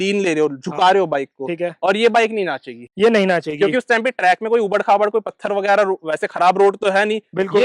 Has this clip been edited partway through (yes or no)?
no